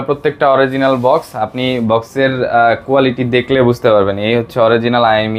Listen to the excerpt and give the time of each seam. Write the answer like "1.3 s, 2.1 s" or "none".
none